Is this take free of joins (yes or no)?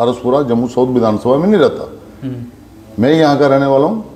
yes